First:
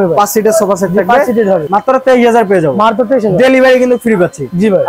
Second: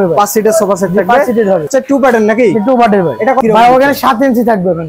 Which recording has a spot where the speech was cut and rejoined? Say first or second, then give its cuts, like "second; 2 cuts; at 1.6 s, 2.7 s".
second; 2 cuts; at 1.7 s, 3.4 s